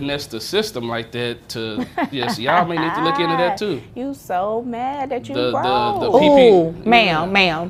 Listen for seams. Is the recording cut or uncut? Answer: uncut